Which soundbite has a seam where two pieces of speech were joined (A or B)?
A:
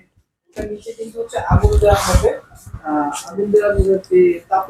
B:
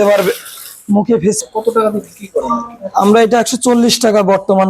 B